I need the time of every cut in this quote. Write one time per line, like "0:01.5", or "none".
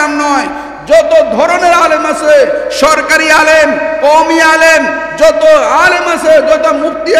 none

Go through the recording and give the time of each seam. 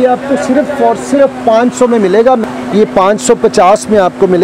0:02.4

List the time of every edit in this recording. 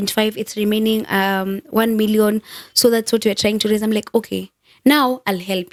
none

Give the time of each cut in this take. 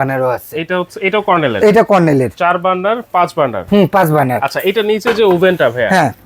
none

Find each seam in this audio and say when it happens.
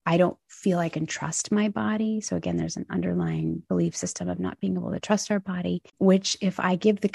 0:05.9

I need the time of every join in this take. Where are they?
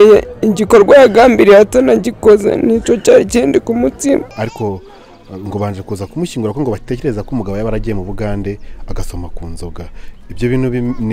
0:04.3

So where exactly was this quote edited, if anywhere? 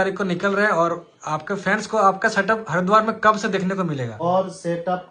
0:04.1

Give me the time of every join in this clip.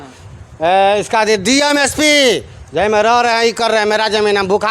none

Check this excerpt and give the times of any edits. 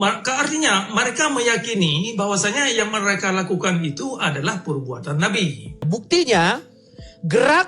0:05.8

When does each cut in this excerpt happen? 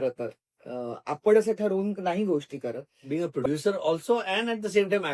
0:02.9

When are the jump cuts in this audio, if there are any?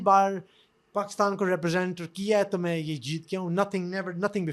none

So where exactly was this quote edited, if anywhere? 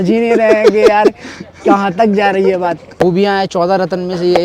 0:02.9

